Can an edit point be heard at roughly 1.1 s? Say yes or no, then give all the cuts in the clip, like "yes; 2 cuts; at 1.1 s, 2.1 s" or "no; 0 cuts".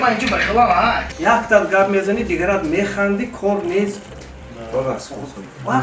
yes; 1 cut; at 1.1 s